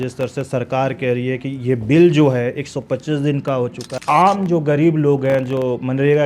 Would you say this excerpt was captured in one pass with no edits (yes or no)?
no